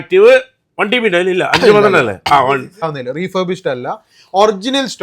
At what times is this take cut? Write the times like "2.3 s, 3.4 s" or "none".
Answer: 2.8 s